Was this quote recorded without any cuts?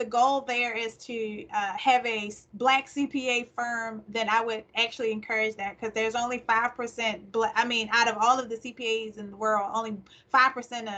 yes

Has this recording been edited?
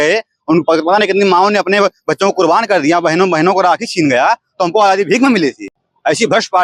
no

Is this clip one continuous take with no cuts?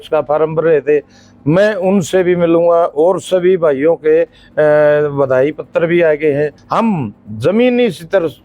no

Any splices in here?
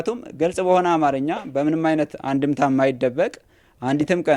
no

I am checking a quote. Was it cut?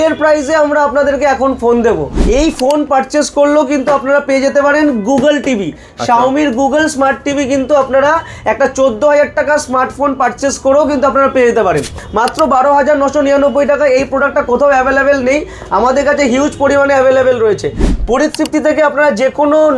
yes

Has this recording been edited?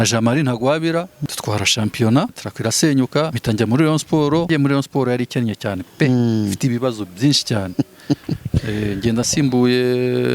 yes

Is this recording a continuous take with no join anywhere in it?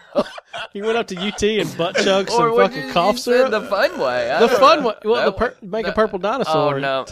yes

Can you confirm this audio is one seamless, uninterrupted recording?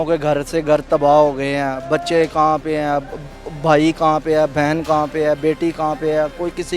yes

